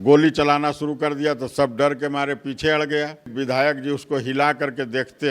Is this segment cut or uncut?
cut